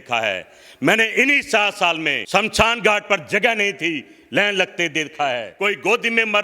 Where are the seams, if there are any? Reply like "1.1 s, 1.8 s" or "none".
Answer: 2.2 s, 5.5 s